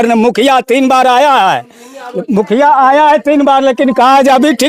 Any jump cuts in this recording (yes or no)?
no